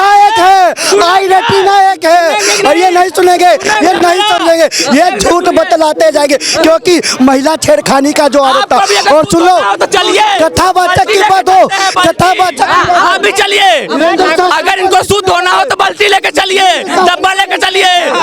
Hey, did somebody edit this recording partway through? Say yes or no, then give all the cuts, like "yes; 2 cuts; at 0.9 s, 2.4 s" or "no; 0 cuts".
no; 0 cuts